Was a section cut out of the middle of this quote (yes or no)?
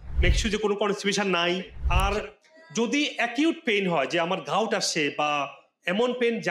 yes